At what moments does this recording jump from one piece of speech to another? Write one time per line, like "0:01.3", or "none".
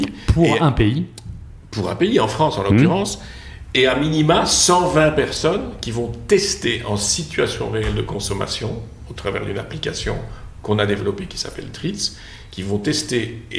none

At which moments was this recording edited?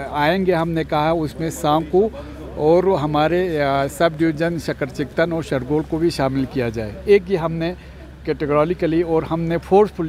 none

